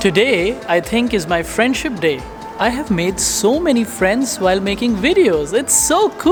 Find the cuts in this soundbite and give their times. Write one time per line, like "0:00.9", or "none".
none